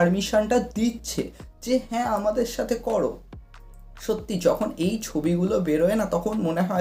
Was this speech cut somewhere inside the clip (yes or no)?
no